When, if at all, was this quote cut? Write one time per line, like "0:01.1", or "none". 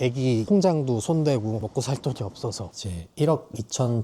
0:02.7